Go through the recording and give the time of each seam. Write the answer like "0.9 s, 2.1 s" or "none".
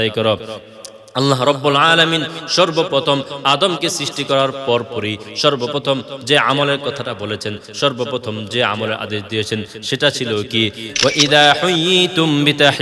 10.8 s